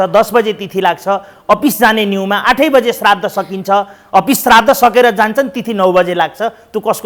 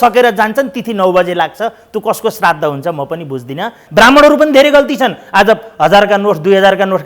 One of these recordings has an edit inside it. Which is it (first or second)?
second